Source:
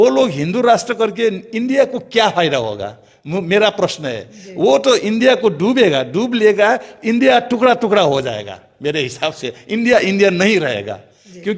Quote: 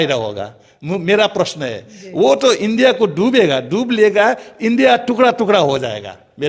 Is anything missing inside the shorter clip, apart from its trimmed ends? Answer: no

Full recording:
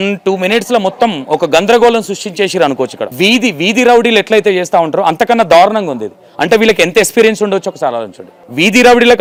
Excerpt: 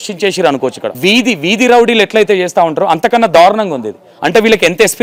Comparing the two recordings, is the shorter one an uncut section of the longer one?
yes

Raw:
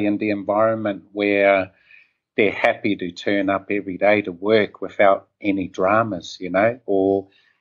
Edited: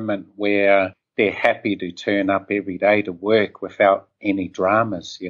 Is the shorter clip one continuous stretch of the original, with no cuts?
no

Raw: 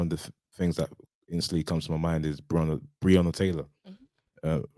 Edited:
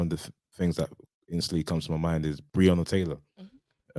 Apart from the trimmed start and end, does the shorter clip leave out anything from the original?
yes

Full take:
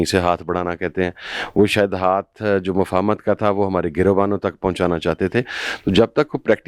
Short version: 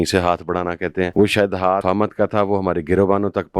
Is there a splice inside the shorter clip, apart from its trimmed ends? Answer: yes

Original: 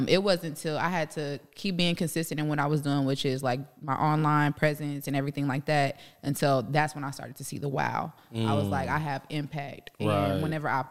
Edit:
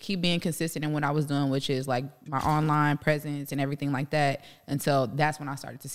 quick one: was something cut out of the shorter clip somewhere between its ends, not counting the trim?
no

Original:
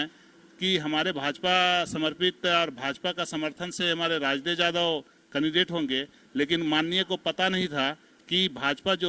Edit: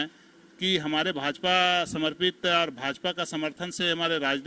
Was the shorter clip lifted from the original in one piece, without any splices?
yes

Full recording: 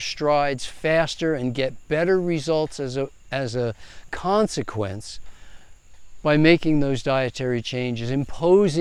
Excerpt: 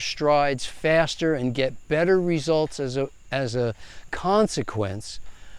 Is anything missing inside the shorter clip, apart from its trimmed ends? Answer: no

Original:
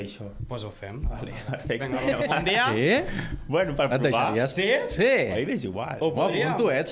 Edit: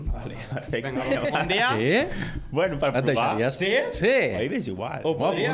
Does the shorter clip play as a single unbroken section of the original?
yes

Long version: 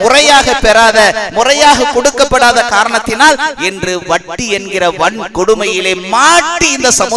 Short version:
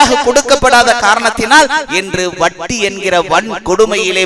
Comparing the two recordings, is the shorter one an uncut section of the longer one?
yes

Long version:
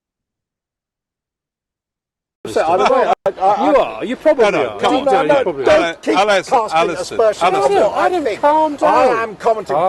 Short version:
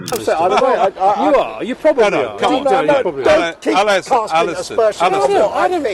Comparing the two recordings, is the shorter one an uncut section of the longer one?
no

